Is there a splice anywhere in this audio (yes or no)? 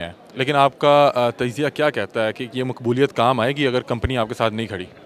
no